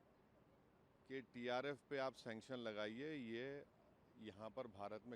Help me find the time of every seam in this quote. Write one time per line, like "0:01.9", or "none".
none